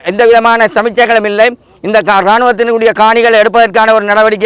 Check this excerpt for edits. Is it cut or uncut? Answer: uncut